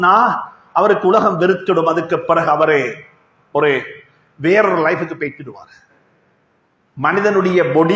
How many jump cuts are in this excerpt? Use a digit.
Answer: 0